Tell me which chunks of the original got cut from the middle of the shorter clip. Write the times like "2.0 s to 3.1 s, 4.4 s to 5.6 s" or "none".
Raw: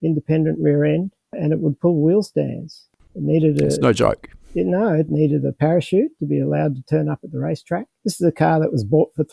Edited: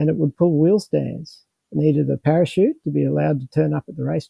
3.2 s to 5.1 s